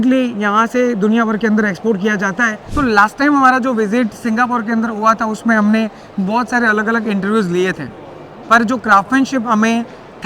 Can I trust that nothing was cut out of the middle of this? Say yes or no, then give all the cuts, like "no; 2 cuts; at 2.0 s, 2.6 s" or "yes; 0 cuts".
no; 1 cut; at 2.6 s